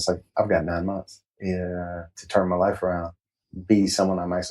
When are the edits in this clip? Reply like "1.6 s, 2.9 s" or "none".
3.2 s